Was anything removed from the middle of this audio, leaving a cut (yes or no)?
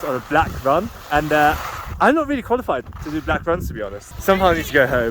yes